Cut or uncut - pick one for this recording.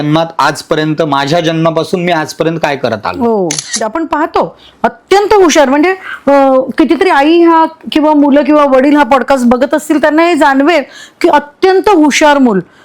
cut